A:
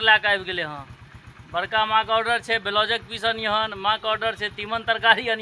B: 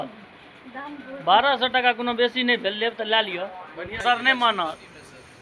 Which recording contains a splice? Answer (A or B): B